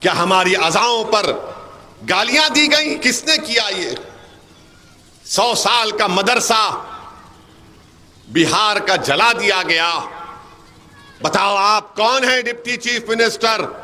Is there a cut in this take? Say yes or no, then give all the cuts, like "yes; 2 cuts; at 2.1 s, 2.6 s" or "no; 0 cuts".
no; 0 cuts